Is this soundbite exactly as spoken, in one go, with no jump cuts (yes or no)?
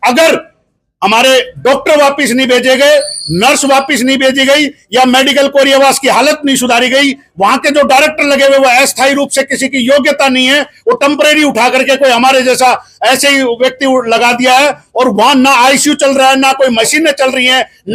yes